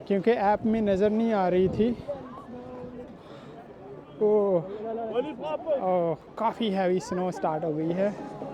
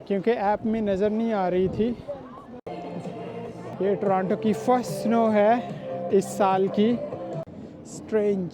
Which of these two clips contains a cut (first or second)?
second